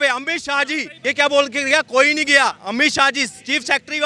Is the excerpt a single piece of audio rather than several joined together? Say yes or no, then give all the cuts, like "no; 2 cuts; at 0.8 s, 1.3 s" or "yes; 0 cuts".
no; 1 cut; at 0.9 s